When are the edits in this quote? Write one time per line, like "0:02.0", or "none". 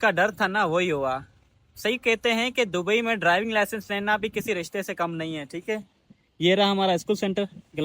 0:01.6